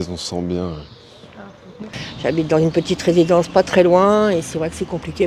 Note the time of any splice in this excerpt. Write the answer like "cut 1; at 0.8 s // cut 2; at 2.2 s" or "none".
cut 1; at 2.0 s